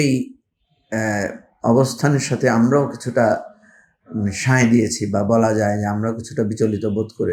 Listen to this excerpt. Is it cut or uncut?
uncut